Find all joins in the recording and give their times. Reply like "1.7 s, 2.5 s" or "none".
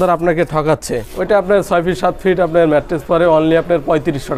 1.1 s